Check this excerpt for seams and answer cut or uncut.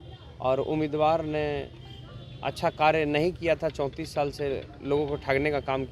uncut